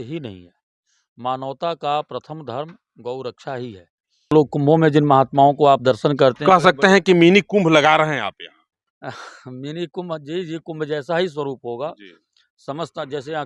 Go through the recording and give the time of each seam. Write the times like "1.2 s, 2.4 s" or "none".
4.3 s

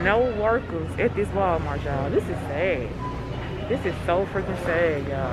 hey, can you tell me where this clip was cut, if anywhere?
none

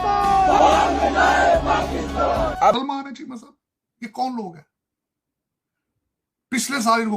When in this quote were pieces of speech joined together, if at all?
2.7 s

